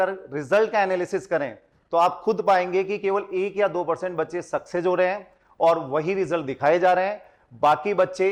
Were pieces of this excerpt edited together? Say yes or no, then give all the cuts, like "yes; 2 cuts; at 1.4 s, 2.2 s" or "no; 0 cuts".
no; 0 cuts